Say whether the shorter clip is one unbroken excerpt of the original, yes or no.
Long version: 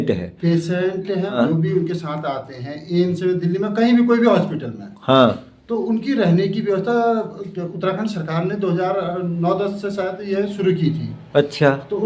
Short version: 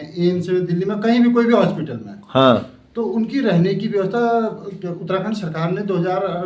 yes